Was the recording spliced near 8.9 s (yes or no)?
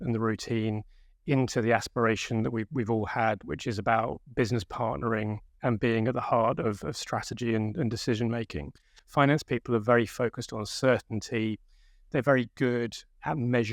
yes